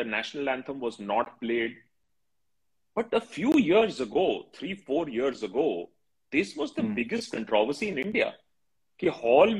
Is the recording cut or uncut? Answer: uncut